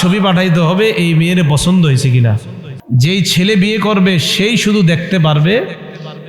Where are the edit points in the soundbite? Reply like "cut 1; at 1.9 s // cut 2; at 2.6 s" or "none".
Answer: cut 1; at 2.7 s